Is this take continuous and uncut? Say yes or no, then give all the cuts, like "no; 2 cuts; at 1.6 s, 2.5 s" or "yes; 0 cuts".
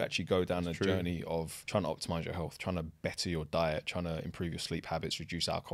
no; 1 cut; at 1.6 s